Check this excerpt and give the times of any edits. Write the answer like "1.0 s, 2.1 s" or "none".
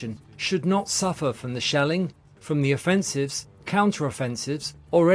none